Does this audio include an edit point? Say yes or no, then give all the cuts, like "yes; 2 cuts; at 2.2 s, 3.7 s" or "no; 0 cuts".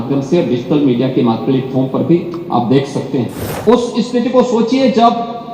yes; 1 cut; at 3.5 s